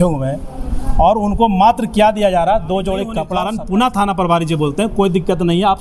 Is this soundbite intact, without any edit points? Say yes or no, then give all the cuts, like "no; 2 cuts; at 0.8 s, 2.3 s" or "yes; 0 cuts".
no; 1 cut; at 3.2 s